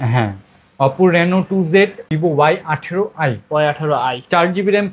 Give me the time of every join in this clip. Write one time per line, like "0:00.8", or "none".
0:02.1

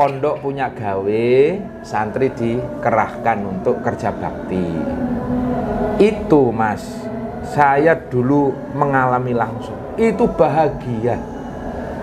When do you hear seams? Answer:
none

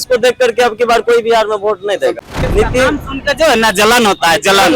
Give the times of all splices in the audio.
0:02.3

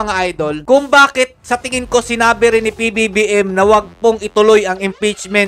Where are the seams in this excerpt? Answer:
none

